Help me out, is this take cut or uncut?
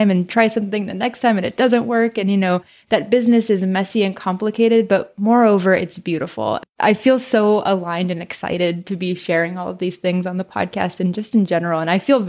cut